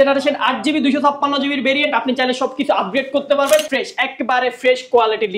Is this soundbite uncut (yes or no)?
no